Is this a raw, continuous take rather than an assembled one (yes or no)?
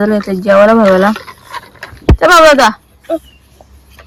yes